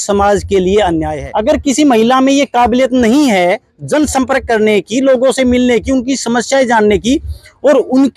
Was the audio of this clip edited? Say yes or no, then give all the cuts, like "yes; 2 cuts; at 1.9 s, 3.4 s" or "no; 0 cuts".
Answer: yes; 1 cut; at 1.1 s